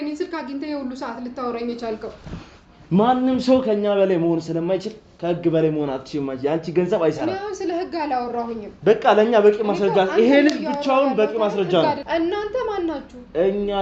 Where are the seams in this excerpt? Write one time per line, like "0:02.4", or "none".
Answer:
0:12.0